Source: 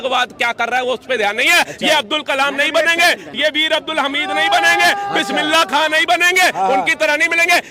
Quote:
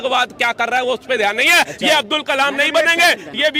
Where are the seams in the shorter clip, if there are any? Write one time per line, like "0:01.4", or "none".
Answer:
none